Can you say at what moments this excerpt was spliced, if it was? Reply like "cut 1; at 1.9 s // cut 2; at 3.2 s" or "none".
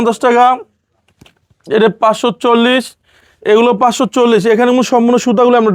none